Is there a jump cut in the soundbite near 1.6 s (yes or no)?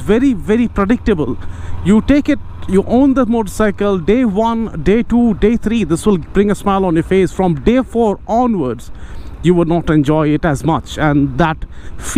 no